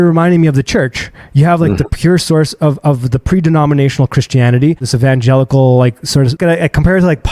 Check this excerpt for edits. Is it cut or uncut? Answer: cut